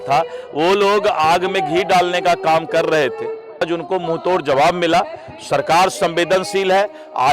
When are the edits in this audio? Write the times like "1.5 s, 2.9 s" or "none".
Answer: 3.7 s

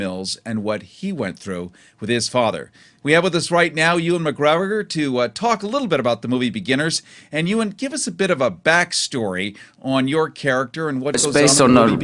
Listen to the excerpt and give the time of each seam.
none

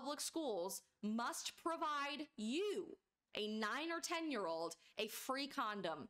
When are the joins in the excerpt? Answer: none

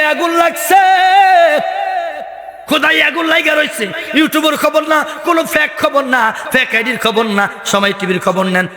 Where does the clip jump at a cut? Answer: none

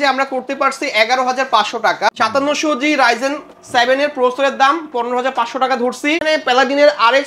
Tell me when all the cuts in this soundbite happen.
2.1 s, 6.2 s

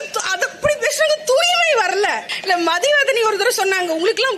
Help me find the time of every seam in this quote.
2.3 s

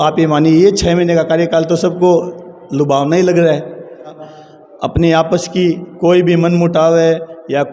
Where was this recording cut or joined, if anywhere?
4.3 s

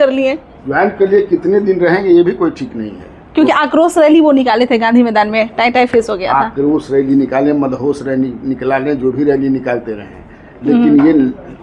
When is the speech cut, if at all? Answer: none

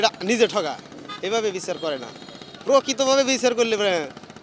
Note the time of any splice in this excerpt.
none

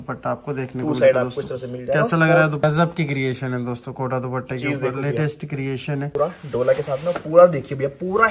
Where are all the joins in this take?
2.6 s, 6.1 s

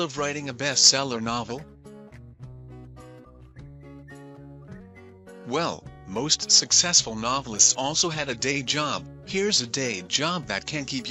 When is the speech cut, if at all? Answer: 1.6 s, 3.3 s, 5.5 s

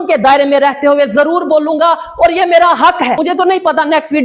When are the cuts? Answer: 3.2 s

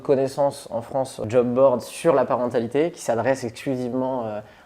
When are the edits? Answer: 1.2 s

